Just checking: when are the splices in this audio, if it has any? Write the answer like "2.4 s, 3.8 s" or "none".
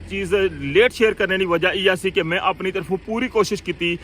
none

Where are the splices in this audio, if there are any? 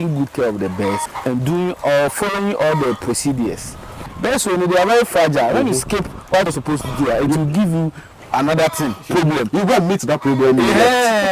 1.1 s, 4.1 s, 6.5 s

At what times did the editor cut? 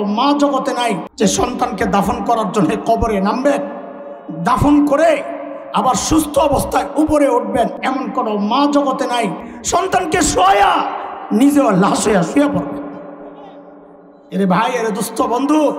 1.1 s

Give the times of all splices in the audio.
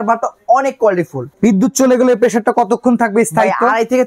1.3 s

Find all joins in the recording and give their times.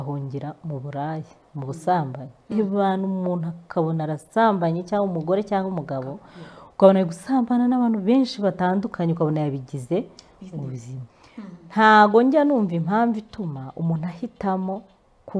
11.1 s

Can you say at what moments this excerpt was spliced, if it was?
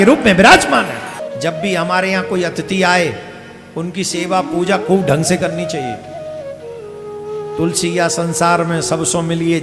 1.2 s

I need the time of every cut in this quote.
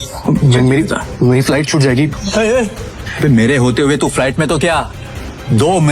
2.1 s, 3.0 s

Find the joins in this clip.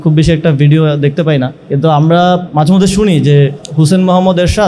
1.6 s, 2.5 s, 3.6 s

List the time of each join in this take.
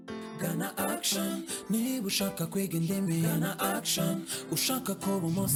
none

